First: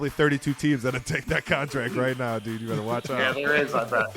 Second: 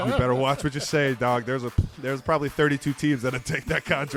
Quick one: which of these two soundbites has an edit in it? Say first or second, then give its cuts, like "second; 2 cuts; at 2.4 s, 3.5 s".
first; 1 cut; at 3.3 s